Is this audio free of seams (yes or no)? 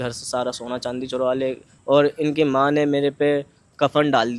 no